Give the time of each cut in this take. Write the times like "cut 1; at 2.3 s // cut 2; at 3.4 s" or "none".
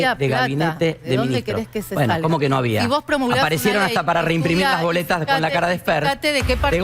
none